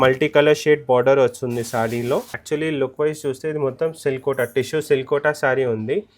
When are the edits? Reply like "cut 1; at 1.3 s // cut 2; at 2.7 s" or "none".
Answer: cut 1; at 2.3 s